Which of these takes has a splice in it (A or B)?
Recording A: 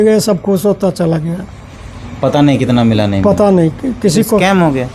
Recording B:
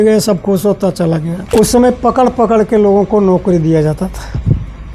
B